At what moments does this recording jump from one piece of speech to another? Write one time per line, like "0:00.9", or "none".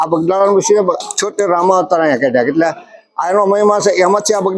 none